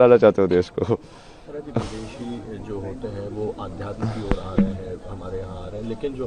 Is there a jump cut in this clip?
no; 0 cuts

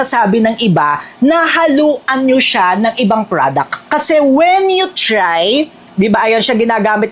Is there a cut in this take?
no; 0 cuts

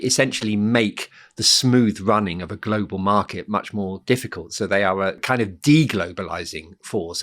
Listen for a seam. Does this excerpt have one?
yes; 1 cut; at 5.2 s

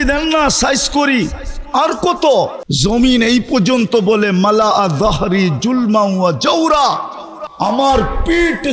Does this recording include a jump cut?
yes; 1 cut; at 2.6 s

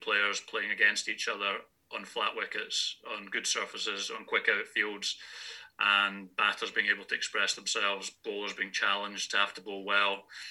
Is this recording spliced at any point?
no; 0 cuts

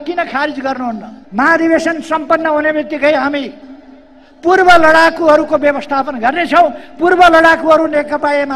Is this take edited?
yes; 1 cut; at 1.1 s

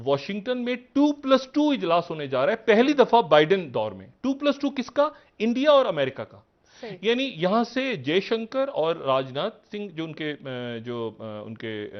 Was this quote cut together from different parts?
no; 0 cuts

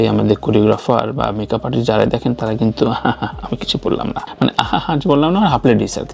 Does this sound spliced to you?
no; 0 cuts

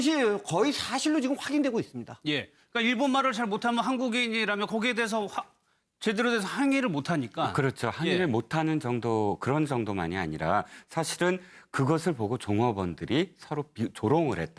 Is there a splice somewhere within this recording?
yes; 1 cut; at 12.3 s

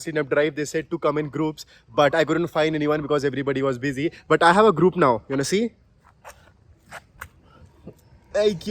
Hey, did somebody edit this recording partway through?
no; 0 cuts

